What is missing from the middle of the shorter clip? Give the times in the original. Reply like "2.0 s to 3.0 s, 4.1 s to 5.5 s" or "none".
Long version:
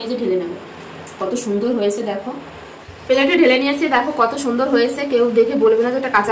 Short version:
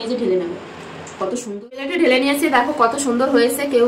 1.4 s to 2.8 s